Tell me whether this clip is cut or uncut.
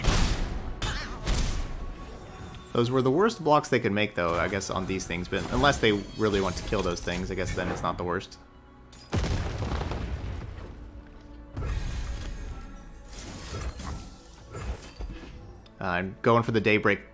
cut